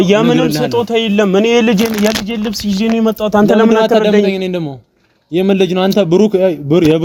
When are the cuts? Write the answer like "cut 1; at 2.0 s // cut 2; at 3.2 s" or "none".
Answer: none